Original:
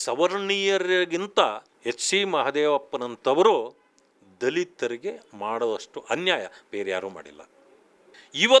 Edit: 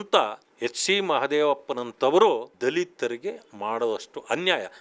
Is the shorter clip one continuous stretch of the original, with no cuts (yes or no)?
no